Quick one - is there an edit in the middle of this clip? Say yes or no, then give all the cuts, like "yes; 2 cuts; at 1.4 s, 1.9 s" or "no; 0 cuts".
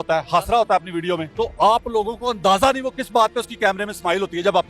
yes; 1 cut; at 1.3 s